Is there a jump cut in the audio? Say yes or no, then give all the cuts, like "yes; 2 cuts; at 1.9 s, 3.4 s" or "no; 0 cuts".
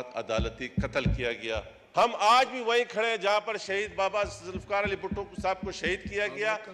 yes; 1 cut; at 1.8 s